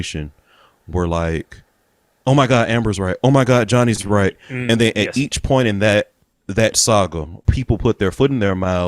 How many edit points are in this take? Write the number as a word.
two